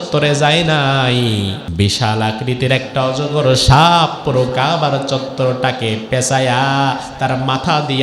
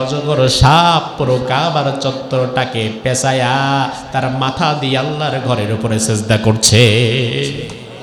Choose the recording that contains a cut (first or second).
first